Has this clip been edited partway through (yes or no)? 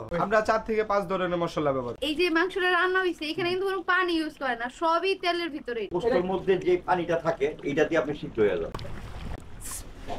yes